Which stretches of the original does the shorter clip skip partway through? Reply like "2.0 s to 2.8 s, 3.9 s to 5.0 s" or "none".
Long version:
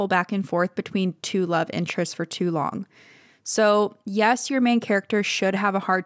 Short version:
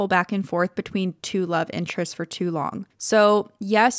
2.9 s to 3.4 s